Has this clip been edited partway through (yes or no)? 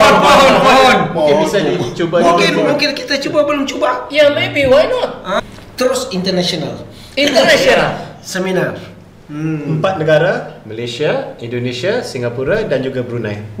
yes